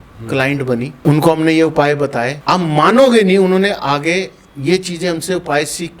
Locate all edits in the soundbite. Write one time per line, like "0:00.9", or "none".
0:00.9
0:02.3